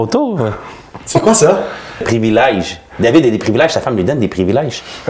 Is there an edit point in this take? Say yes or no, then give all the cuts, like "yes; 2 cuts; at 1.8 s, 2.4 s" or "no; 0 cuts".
yes; 1 cut; at 2.1 s